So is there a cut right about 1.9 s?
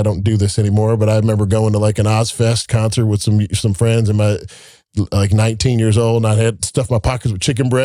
no; 0 cuts

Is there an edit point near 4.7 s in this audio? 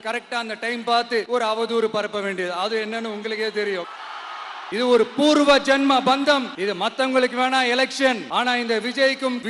yes; 2 cuts; at 4.7 s, 6.5 s

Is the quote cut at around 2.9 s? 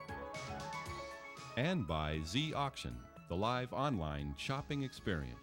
no; 1 cut; at 1.4 s

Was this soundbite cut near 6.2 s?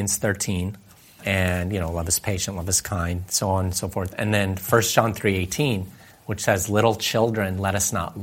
no; 1 cut; at 1.2 s

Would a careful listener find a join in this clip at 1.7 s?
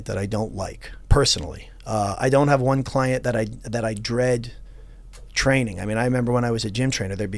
no; 0 cuts

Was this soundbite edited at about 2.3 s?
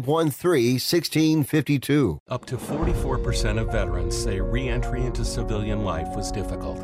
yes; 1 cut; at 2.3 s

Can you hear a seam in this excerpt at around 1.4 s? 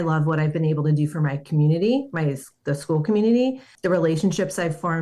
no; 1 cut; at 3.7 s

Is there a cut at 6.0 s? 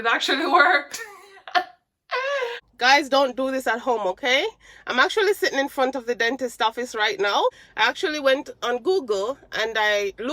no; 2 cuts; at 2.6 s, 7.6 s

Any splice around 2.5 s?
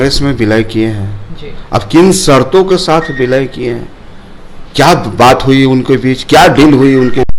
no; 0 cuts

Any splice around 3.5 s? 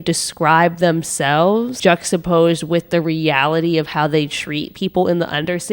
no; 1 cut; at 1.7 s

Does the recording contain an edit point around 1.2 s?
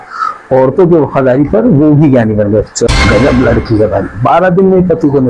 no; 1 cut; at 2.9 s

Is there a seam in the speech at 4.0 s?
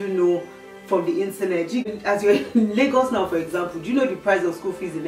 no; 1 cut; at 1.9 s

